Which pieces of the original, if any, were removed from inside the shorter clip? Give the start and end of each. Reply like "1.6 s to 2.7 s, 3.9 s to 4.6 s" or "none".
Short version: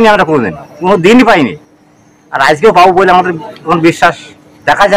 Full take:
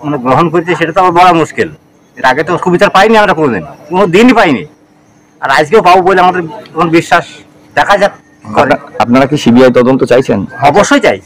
none